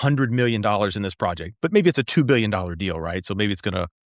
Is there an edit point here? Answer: no; 0 cuts

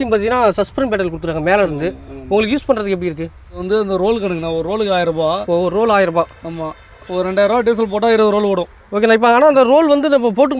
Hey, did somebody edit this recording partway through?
yes; 1 cut; at 3.6 s

